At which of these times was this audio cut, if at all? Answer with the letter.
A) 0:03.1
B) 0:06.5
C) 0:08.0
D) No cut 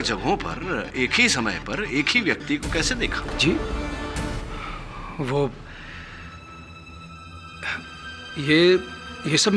A